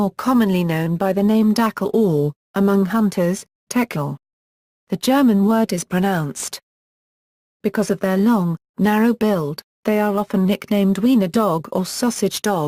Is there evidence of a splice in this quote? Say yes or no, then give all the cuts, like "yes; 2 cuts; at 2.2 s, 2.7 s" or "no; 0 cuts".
no; 0 cuts